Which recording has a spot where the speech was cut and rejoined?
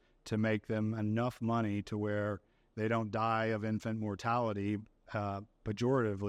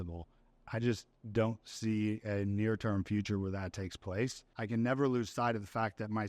second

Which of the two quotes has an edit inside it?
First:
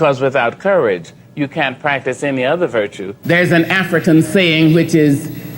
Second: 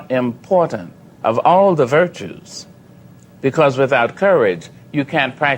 first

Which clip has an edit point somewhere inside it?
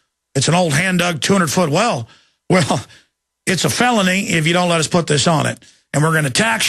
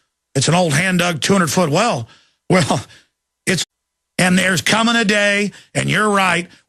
first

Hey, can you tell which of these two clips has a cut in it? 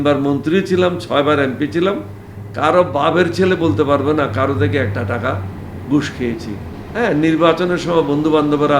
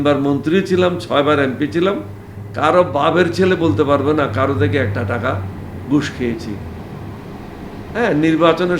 first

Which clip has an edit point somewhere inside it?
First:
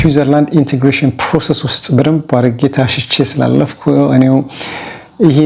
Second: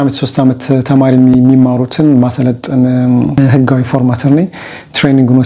second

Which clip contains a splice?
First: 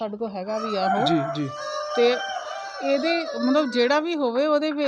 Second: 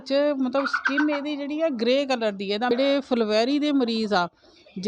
second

